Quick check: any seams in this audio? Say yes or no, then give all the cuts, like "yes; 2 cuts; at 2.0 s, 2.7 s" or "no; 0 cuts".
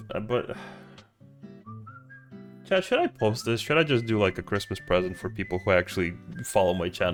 no; 0 cuts